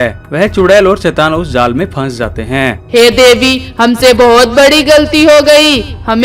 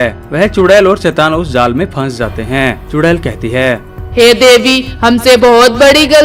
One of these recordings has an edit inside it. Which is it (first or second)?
first